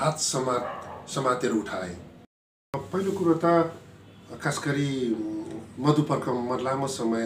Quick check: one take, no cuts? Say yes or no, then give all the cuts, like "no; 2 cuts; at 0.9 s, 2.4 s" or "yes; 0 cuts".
no; 1 cut; at 2.6 s